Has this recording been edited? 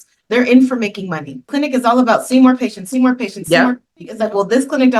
yes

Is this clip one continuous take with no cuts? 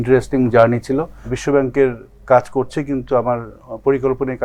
no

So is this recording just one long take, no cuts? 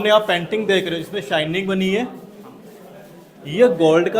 yes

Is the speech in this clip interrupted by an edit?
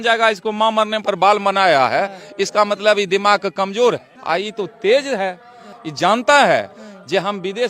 no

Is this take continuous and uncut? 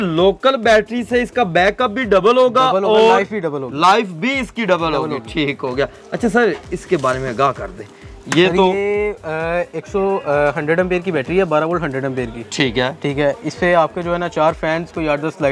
yes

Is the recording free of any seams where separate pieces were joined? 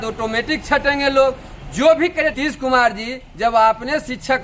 no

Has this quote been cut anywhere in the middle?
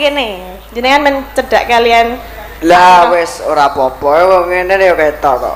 no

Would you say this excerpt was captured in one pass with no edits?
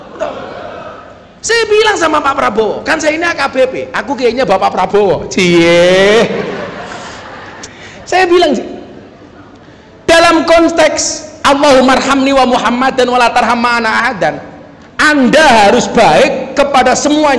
no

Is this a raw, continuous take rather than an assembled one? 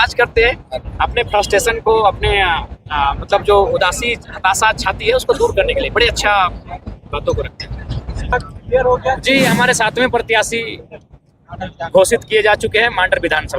no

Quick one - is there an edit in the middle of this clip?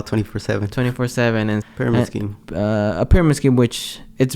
yes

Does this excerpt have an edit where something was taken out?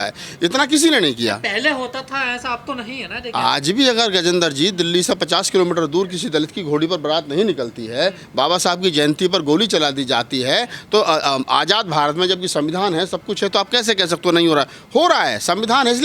no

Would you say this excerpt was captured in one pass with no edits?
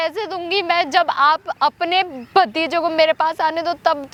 yes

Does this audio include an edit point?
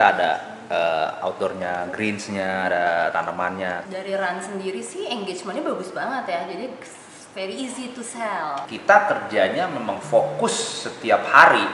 yes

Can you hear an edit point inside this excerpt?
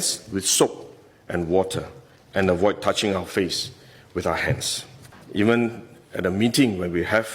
yes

